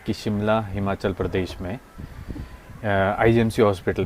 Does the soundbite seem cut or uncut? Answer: uncut